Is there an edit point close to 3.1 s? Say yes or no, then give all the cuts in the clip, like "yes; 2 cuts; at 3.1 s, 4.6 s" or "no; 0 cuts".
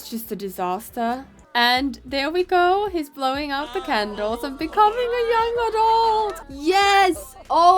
no; 2 cuts; at 1.4 s, 6.4 s